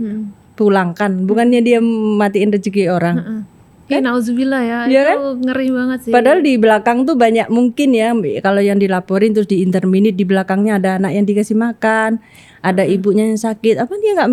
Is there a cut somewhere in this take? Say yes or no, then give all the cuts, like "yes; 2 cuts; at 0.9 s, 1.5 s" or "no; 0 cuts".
no; 0 cuts